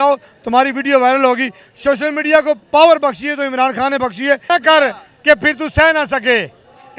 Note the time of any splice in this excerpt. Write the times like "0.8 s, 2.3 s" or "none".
4.4 s